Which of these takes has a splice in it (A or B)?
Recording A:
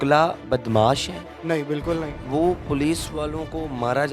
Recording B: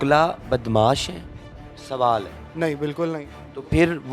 A